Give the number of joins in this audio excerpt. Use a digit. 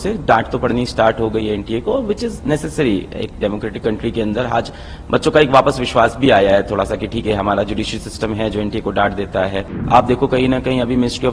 1